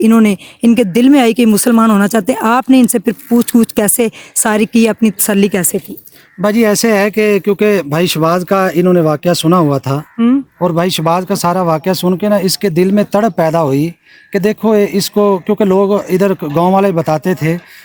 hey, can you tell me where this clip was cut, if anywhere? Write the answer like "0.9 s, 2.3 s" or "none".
none